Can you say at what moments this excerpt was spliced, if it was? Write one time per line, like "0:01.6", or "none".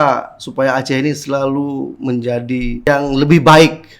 0:02.9